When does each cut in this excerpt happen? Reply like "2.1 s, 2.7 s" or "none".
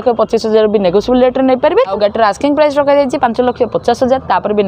1.9 s